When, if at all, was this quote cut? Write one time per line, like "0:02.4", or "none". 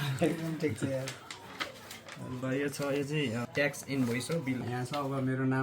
0:03.5
0:04.6